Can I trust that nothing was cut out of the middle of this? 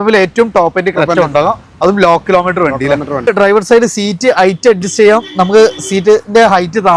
no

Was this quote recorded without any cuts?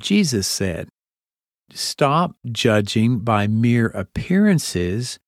no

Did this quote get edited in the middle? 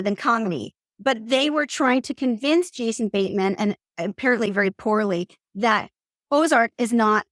no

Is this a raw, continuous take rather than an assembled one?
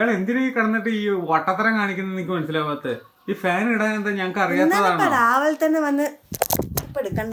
yes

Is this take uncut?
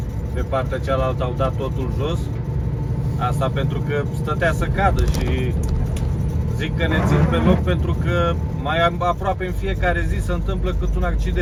yes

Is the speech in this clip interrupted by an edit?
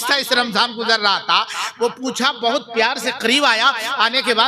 no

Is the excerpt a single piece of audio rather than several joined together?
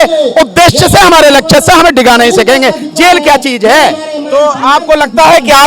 yes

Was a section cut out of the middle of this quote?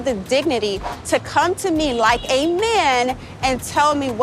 no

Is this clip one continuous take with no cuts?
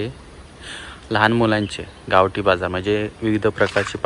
yes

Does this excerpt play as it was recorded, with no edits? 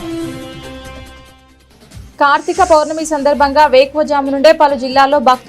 no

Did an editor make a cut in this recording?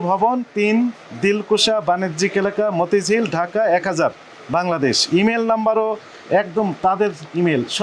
no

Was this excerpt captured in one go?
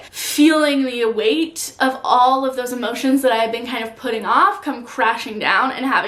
yes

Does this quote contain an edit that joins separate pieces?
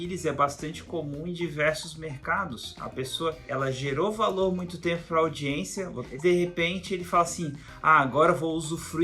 yes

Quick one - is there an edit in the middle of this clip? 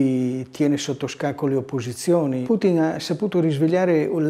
yes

